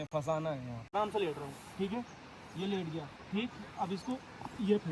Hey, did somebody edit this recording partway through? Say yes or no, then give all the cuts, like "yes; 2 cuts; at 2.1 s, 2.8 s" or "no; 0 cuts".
yes; 1 cut; at 0.9 s